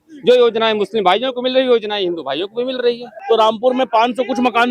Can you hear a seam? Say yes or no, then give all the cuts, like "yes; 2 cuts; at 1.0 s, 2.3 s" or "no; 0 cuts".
yes; 1 cut; at 3.1 s